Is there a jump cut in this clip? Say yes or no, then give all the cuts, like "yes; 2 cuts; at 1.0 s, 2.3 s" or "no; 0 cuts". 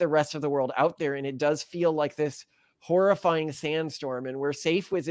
no; 0 cuts